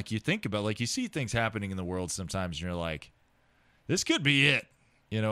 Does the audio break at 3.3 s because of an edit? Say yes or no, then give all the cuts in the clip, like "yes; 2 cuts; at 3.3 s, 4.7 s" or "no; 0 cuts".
no; 0 cuts